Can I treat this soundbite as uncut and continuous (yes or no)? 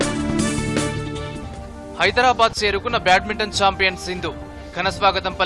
no